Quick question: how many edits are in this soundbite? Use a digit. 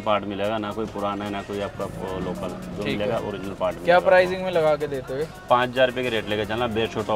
0